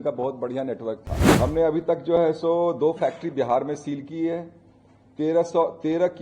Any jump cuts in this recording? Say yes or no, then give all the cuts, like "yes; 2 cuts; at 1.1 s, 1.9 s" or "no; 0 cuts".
yes; 1 cut; at 1.2 s